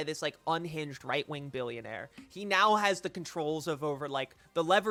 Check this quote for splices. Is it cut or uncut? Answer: uncut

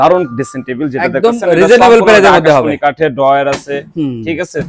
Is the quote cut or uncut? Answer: uncut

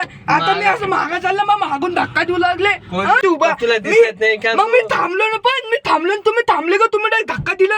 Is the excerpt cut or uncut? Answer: cut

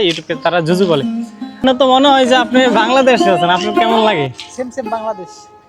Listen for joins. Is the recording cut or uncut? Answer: cut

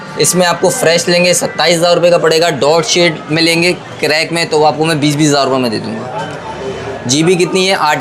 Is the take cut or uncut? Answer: uncut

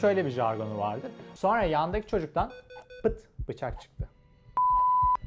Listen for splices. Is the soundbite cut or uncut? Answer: cut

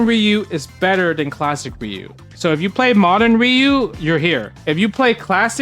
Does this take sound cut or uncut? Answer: cut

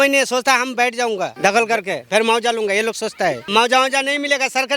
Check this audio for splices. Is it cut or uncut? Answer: cut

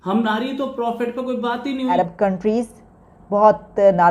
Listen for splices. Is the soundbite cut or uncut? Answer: cut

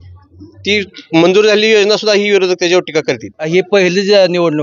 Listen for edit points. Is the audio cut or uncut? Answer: cut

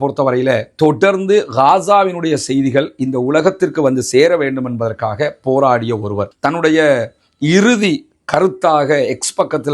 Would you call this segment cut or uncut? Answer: uncut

